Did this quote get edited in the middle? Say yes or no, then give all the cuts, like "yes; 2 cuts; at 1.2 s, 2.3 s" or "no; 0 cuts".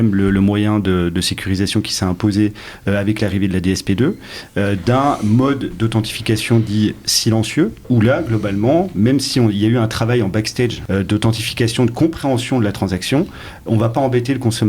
yes; 2 cuts; at 7.8 s, 10.8 s